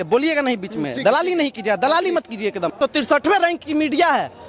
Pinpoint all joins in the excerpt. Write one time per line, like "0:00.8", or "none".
0:02.8